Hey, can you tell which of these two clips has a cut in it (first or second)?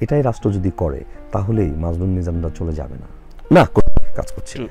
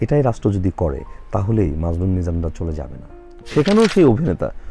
second